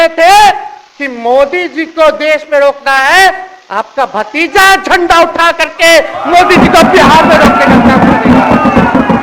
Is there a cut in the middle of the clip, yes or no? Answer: no